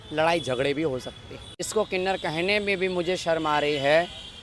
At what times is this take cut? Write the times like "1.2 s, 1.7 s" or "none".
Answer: 1.7 s